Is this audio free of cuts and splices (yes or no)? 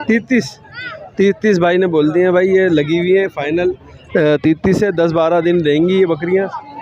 yes